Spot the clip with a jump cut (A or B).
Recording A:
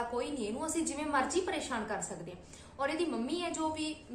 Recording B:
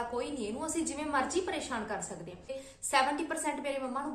B